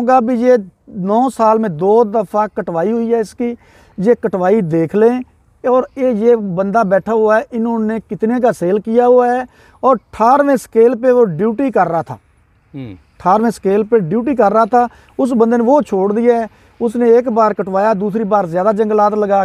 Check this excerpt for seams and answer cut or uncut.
uncut